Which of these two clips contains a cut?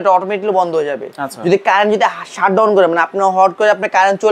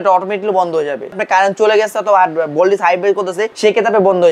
second; 2 cuts; at 1.2 s, 3.5 s

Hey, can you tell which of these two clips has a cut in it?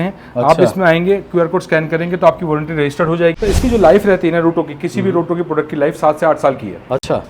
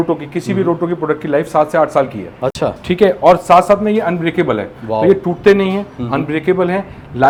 first; 1 cut; at 3.4 s

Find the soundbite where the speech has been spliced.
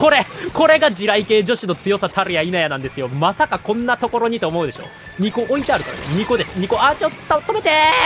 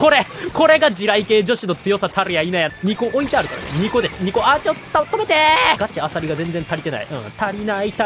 second; 2 cuts; at 2.7 s, 5.8 s

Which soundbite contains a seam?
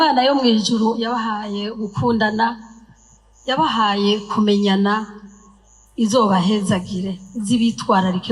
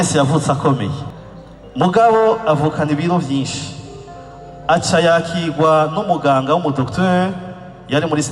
second; 1 cut; at 1.0 s

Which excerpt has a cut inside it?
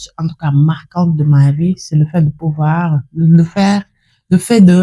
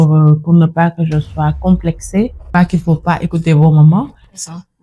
second; 1 cut; at 2.5 s

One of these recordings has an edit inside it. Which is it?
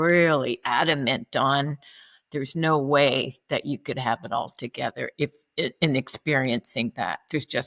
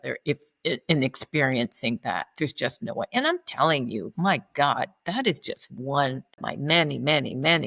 second; 1 cut; at 6.5 s

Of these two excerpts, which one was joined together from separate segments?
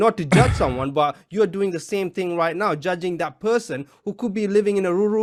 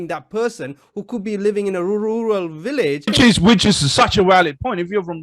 second; 1 cut; at 3.1 s

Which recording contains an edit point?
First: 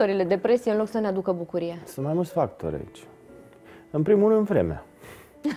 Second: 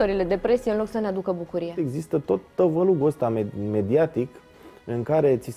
second; 1 cut; at 1.8 s

